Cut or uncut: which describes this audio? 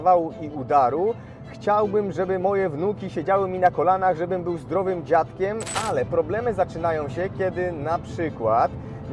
cut